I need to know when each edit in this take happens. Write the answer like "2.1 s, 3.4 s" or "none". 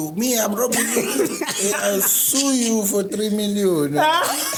none